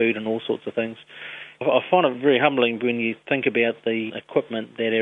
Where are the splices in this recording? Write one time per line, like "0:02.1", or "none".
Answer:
0:01.6
0:03.2
0:04.1